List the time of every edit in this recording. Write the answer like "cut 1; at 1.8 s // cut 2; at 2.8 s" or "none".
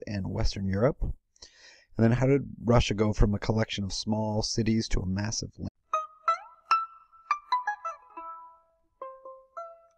none